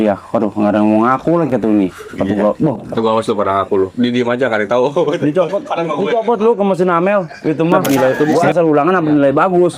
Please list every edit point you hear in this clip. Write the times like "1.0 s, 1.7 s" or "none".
7.8 s